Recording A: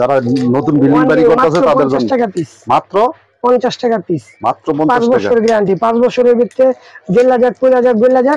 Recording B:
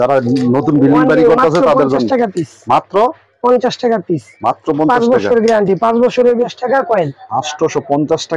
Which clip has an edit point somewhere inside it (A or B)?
B